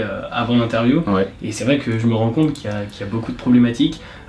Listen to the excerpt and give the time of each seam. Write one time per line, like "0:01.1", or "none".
none